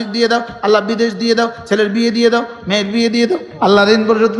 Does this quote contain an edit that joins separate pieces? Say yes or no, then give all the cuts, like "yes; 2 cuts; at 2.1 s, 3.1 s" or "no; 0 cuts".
yes; 1 cut; at 3.5 s